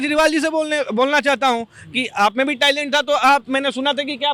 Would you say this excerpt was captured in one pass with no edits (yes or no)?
yes